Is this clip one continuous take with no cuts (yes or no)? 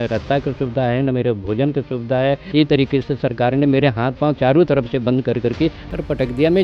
no